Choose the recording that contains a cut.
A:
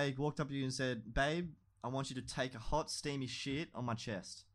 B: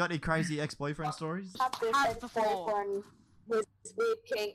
B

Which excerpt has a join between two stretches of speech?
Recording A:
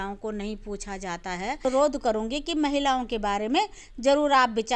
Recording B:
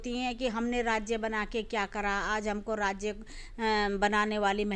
A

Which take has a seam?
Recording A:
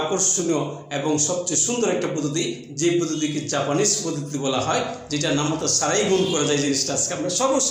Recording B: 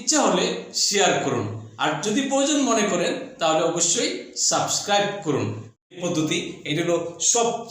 B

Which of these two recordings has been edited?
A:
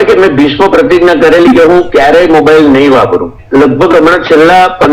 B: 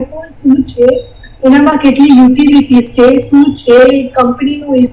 A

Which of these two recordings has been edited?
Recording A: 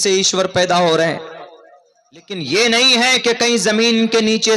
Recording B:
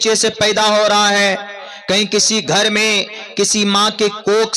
A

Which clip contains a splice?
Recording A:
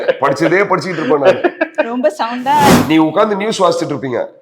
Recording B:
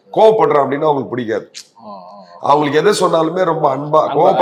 A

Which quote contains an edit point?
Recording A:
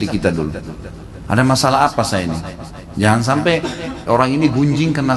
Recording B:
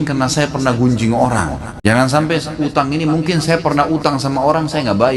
B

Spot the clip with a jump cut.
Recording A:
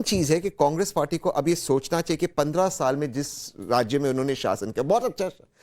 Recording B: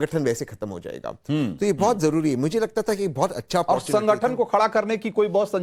A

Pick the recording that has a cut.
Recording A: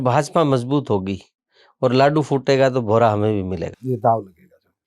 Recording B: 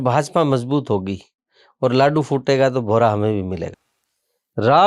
B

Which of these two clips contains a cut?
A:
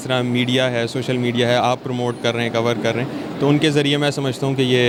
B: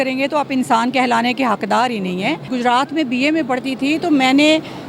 B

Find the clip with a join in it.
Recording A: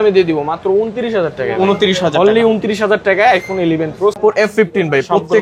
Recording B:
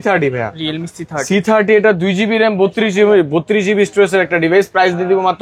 A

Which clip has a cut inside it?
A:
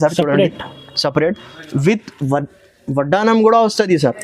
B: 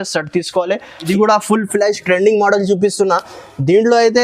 B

